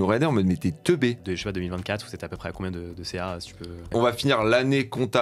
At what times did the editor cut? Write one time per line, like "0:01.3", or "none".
0:01.2
0:03.9